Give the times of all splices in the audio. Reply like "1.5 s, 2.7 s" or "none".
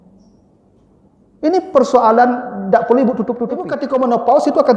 3.8 s